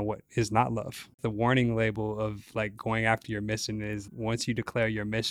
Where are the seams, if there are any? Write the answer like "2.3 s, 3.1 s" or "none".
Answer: 1.2 s, 4.0 s

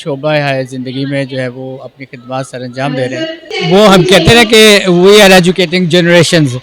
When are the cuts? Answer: 3.5 s

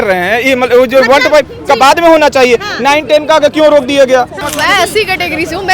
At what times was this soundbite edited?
4.4 s

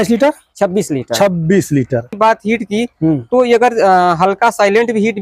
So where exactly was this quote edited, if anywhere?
2.2 s

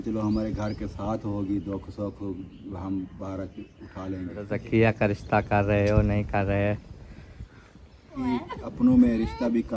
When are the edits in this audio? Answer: 4.5 s, 8.2 s

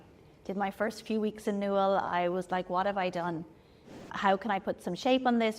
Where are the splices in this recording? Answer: 4.1 s

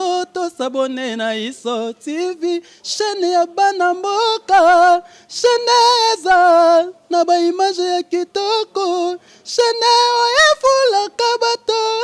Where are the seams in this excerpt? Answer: none

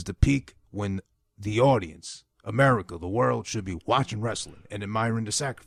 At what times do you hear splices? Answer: none

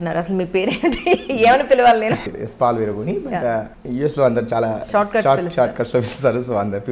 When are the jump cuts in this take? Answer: 2.2 s, 3.8 s

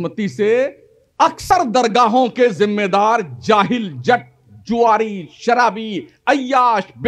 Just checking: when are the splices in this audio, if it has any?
1.4 s

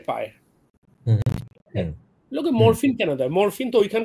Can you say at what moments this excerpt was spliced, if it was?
none

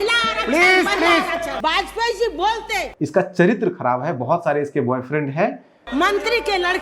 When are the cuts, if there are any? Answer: 1.5 s, 2.9 s, 5.8 s

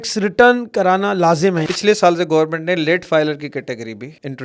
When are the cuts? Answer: 1.7 s

